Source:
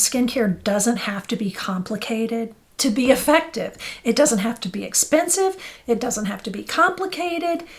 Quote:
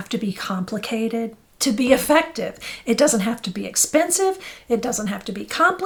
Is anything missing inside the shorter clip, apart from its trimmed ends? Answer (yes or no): no